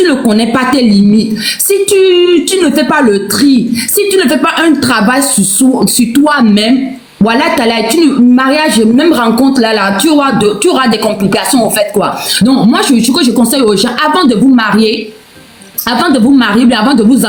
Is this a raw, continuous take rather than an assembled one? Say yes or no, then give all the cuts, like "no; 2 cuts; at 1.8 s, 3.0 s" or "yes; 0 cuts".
yes; 0 cuts